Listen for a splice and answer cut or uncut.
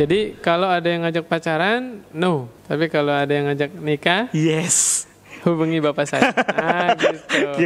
cut